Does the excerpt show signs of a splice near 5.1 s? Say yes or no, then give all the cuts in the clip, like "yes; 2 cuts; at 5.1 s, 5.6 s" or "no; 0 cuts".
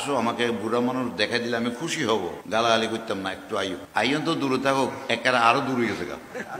no; 2 cuts; at 2.4 s, 3.8 s